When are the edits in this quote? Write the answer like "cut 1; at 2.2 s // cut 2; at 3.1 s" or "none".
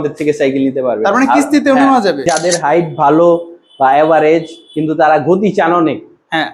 cut 1; at 2.2 s